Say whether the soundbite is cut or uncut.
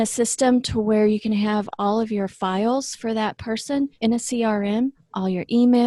uncut